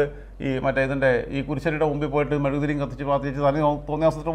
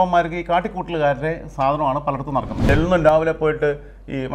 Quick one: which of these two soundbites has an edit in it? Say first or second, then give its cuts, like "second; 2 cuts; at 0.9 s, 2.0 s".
second; 1 cut; at 2.7 s